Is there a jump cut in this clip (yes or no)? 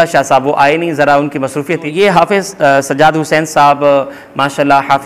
yes